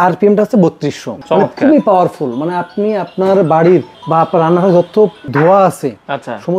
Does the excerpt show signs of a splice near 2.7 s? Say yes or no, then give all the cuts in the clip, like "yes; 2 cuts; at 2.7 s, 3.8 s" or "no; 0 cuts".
no; 2 cuts; at 1.1 s, 5.2 s